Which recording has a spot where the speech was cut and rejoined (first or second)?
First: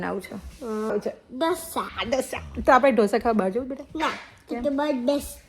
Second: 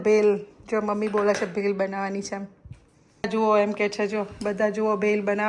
first